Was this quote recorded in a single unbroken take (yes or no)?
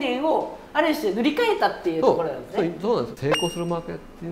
no